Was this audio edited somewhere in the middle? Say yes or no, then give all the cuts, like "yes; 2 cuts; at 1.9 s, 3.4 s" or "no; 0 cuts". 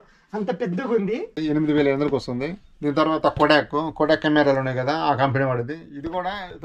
yes; 1 cut; at 1.3 s